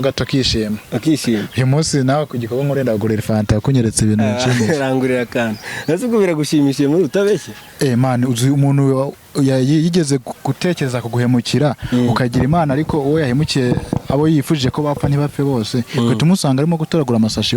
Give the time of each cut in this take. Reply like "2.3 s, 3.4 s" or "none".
none